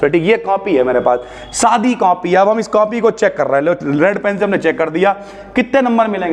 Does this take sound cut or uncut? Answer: uncut